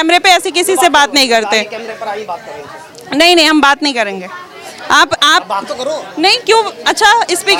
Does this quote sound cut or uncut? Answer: uncut